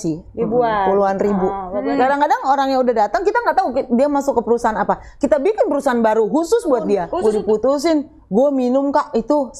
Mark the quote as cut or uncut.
cut